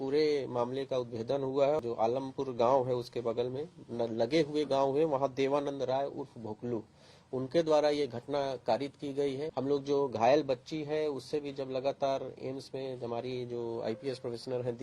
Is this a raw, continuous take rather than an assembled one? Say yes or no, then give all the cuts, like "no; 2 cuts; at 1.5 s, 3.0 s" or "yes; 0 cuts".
no; 2 cuts; at 1.8 s, 9.5 s